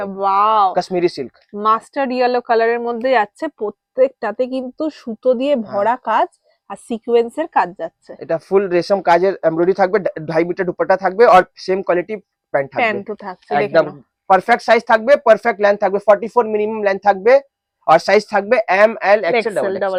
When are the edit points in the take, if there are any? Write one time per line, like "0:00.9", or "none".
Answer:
none